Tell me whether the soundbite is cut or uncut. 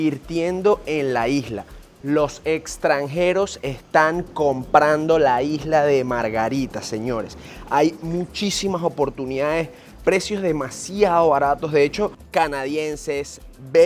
cut